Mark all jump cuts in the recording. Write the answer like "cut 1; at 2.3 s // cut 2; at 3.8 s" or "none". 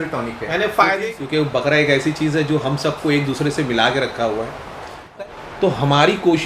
cut 1; at 1.0 s // cut 2; at 5.0 s